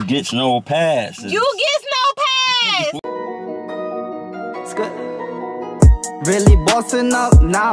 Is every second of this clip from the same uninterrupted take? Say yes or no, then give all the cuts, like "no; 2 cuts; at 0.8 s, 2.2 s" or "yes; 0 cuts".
no; 1 cut; at 3.0 s